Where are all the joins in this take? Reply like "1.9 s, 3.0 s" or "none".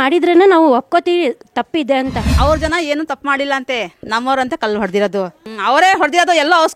2.3 s, 5.4 s